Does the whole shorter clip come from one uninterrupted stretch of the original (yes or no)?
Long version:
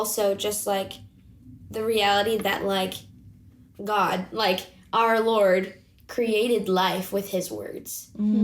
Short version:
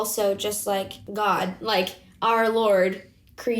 no